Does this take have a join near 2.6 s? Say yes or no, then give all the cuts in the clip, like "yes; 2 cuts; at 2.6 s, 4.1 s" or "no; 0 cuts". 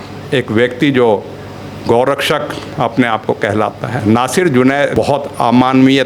no; 2 cuts; at 4.0 s, 4.9 s